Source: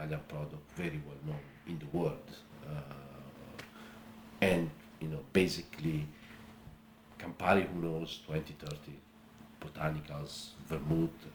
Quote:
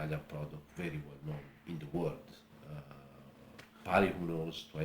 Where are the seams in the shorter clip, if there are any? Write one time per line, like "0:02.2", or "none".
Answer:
0:03.8